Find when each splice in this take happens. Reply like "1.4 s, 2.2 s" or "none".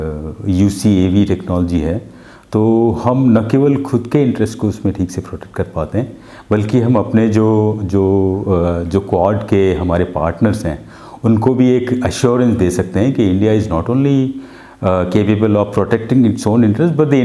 none